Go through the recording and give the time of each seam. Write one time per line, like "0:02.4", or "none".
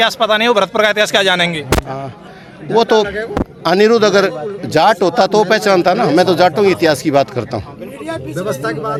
none